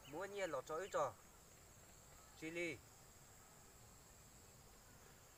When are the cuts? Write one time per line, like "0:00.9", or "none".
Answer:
none